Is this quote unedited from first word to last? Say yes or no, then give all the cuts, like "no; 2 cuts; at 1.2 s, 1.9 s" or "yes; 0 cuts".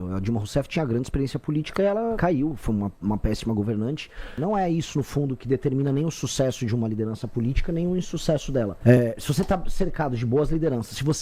no; 3 cuts; at 2.2 s, 4.3 s, 8.7 s